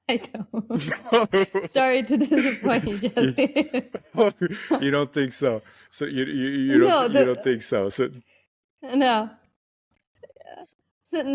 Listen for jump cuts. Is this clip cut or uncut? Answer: uncut